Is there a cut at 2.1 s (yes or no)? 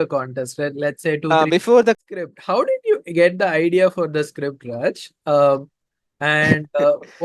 yes